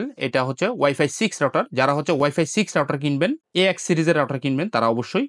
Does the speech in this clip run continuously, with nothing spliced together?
yes; 0 cuts

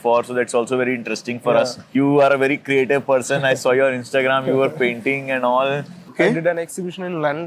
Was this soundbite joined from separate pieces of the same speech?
yes; 1 cut; at 6.1 s

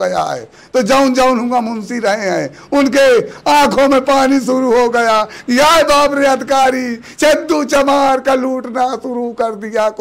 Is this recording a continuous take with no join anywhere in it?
yes; 0 cuts

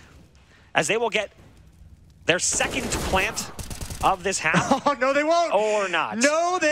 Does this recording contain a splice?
no; 0 cuts

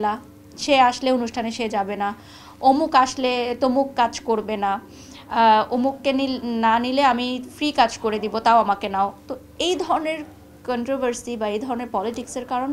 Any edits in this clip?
no; 0 cuts

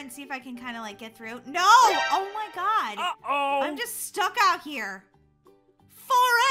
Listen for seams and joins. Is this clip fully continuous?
yes; 0 cuts

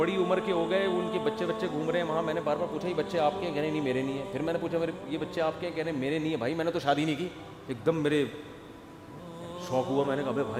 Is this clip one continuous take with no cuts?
yes; 0 cuts

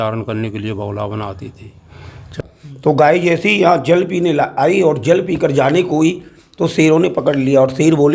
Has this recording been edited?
yes; 1 cut; at 2.3 s

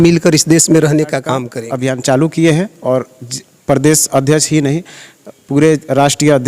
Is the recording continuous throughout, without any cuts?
no; 1 cut; at 1.5 s

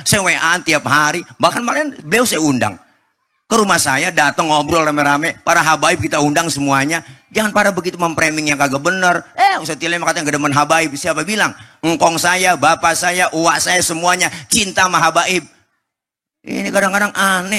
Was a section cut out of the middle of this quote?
no; 0 cuts

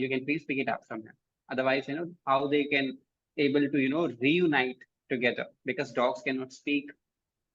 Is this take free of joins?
yes; 0 cuts

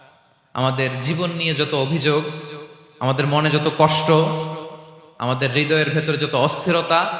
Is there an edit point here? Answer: no; 0 cuts

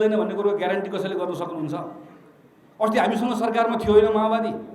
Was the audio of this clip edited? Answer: no; 0 cuts

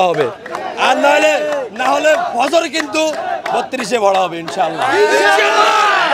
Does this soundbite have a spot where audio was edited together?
no; 0 cuts

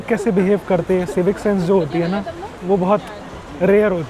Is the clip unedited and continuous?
yes; 0 cuts

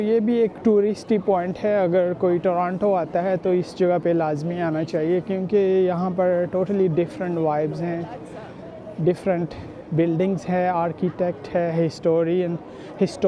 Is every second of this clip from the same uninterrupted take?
yes; 0 cuts

